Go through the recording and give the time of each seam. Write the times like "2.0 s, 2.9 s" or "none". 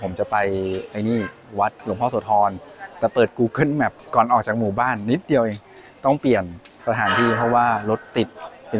1.8 s, 4.0 s